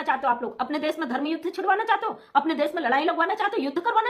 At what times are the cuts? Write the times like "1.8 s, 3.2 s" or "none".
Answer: none